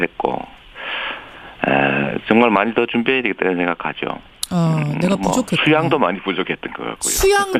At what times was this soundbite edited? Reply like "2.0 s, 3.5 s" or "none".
none